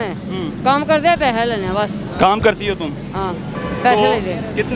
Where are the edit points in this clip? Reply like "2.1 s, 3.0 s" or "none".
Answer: 2.0 s, 3.5 s